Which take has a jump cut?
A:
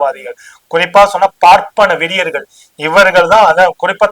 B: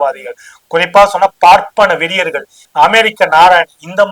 B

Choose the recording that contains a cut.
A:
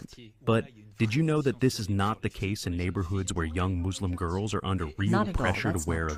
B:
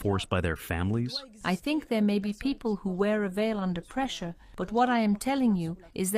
B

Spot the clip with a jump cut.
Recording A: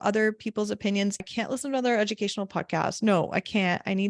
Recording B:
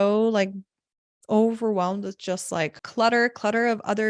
A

